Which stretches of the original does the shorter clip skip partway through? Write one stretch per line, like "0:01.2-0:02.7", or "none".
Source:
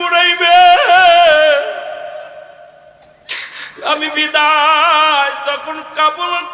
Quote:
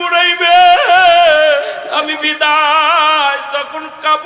0:01.8-0:03.8